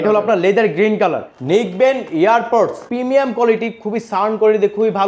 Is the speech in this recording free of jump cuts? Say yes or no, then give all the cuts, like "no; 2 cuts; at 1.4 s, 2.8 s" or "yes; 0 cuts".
no; 2 cuts; at 1.3 s, 2.8 s